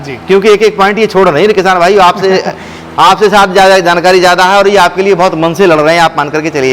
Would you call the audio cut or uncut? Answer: uncut